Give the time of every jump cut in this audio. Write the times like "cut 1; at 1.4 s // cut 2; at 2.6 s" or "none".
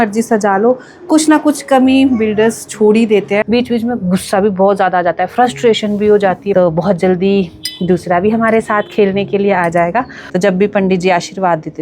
cut 1; at 3.4 s // cut 2; at 6.5 s // cut 3; at 10.2 s